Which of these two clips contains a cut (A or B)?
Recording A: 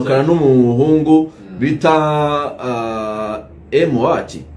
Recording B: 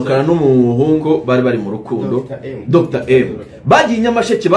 B